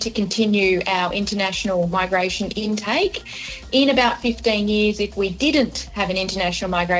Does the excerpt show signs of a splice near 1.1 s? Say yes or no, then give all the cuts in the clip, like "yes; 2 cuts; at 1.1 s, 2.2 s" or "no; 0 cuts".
no; 0 cuts